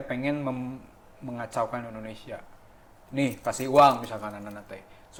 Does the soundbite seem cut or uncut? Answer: uncut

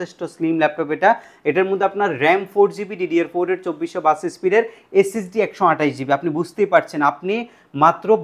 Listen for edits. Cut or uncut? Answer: uncut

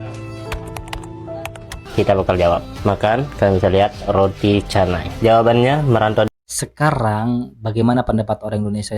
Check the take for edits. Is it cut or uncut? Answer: cut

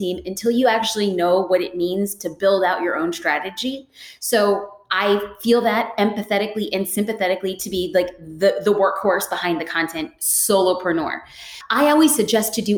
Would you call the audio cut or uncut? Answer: cut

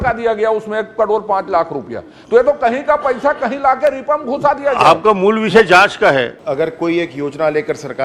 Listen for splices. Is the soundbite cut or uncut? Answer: cut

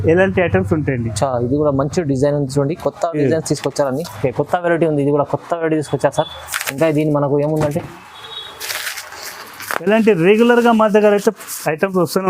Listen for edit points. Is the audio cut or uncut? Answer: cut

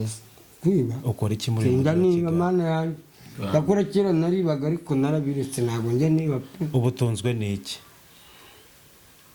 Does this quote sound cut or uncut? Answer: uncut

